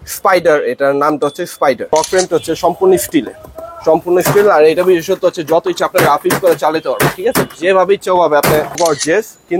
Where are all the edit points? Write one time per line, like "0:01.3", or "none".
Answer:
0:01.9
0:08.8

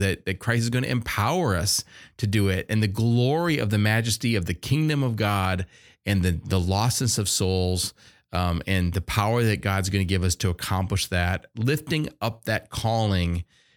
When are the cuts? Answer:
none

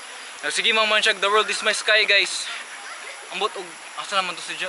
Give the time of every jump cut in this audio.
0:02.7

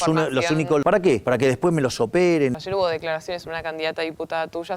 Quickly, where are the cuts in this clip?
0:01.0
0:02.6

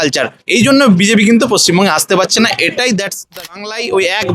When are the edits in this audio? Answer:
0:03.4

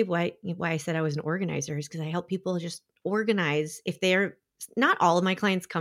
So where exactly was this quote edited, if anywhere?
none

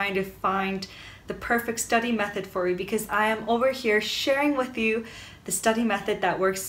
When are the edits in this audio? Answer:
none

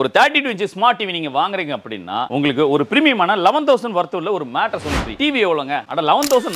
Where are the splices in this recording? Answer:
0:05.1

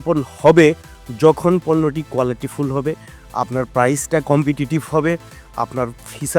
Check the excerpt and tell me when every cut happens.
none

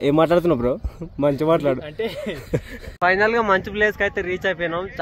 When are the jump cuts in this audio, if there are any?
0:02.8

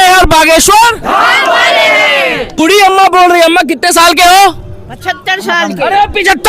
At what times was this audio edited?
0:02.6

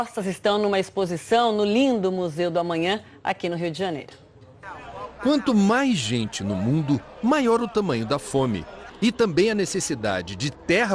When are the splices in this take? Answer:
none

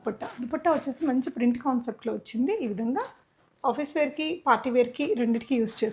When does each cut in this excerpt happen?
none

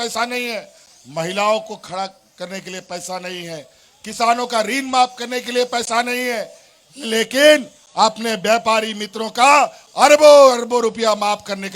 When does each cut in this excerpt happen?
none

